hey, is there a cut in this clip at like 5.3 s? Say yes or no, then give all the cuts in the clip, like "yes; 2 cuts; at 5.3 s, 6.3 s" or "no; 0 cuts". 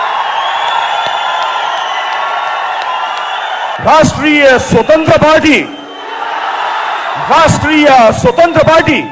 no; 1 cut; at 3.8 s